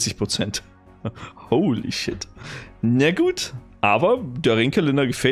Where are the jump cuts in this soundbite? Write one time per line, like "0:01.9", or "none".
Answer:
none